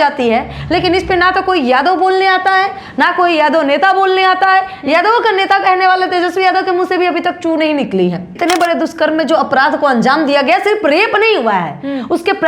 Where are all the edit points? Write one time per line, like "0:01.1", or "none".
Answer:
0:08.3